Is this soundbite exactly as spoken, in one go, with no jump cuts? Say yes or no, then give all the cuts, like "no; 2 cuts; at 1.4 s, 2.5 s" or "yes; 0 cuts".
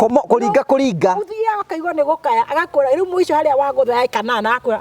yes; 0 cuts